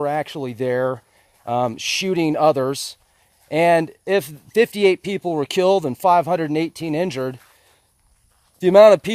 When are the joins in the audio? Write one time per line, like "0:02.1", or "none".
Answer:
none